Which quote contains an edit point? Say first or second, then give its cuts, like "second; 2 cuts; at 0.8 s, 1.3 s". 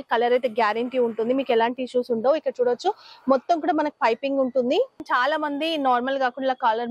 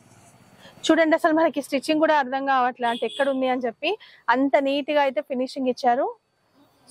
first; 1 cut; at 5.0 s